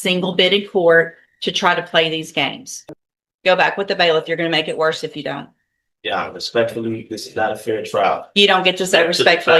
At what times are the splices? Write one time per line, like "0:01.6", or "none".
0:02.7

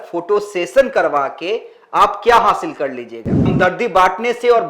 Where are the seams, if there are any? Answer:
0:03.4

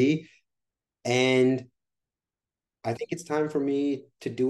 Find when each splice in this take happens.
none

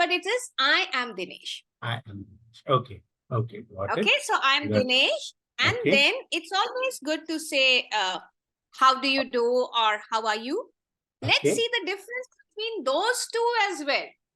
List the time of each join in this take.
none

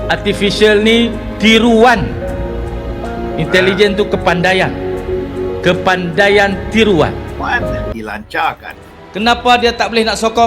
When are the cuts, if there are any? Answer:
0:07.9

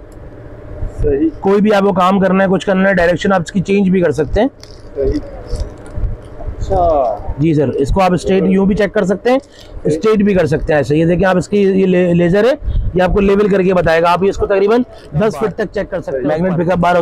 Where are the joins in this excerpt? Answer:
0:16.0

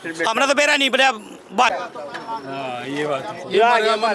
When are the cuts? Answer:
0:01.7

